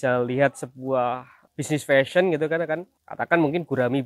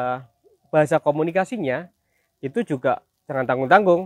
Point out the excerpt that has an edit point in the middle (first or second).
first